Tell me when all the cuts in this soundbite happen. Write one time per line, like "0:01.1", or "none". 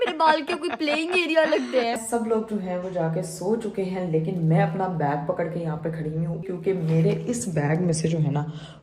0:02.0
0:06.5

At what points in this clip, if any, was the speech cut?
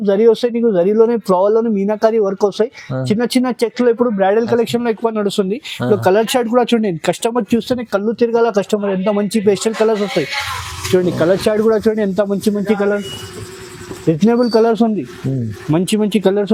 none

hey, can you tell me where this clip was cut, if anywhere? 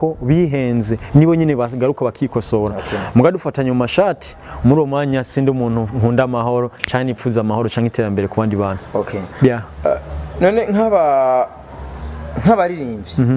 none

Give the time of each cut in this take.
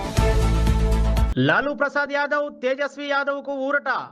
0:01.3

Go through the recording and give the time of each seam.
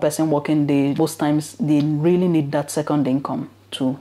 0:00.9

